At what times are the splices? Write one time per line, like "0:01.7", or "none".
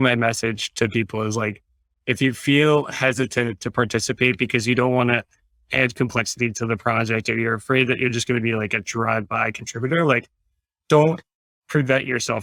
none

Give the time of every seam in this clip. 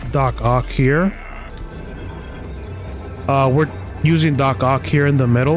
0:02.9
0:03.8

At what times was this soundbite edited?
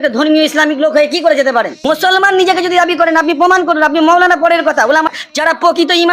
0:01.8
0:05.1

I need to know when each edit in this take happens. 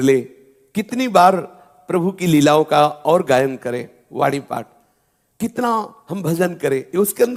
none

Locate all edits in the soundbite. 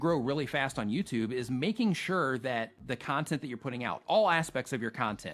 none

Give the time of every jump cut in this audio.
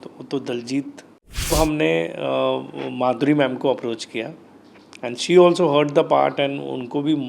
0:01.5

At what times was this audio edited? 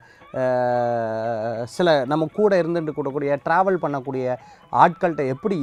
none

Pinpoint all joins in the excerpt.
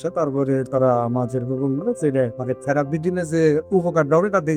0:02.4

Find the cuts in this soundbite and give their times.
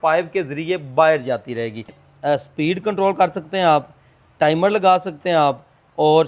0:02.0

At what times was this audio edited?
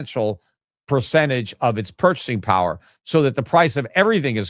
none

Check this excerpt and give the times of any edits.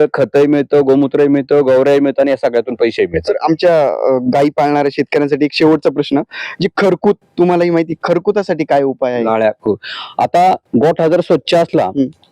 none

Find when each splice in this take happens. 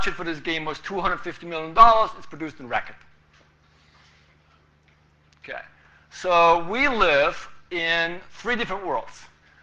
0:06.8

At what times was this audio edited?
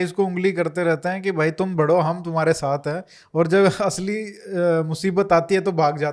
none

